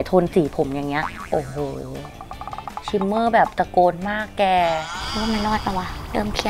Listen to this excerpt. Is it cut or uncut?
cut